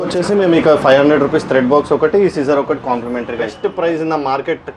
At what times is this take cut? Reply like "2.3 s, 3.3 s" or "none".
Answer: 3.5 s